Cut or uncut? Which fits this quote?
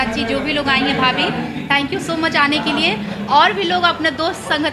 uncut